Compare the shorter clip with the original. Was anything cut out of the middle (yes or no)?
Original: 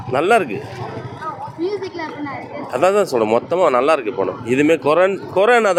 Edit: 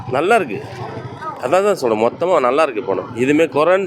yes